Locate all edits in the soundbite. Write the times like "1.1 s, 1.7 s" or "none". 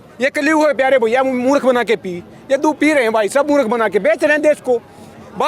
none